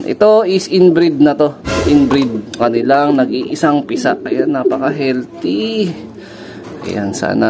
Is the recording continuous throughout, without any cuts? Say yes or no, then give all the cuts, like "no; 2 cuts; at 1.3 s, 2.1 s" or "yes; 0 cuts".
no; 1 cut; at 2.6 s